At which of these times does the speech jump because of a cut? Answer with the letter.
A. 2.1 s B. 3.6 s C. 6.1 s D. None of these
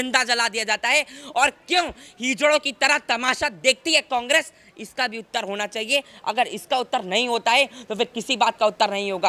D